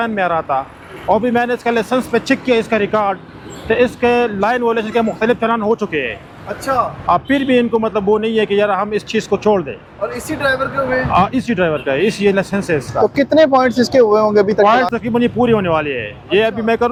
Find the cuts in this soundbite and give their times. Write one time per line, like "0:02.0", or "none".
none

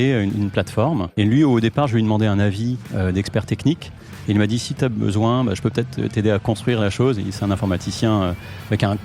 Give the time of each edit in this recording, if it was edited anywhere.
0:01.1

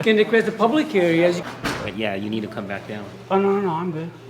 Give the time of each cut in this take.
0:01.4

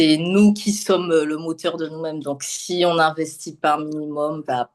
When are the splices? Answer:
none

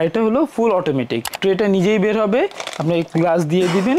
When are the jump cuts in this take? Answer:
0:01.3

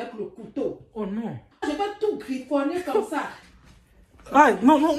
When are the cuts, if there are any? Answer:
0:01.4
0:03.3

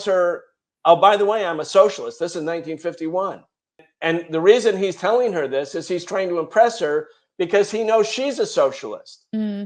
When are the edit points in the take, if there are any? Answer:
0:03.9

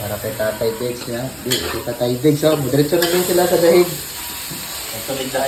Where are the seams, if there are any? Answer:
none

